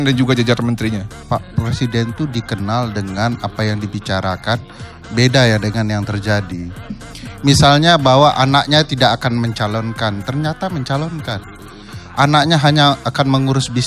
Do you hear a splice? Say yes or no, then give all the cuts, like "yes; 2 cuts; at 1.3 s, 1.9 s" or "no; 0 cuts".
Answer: no; 0 cuts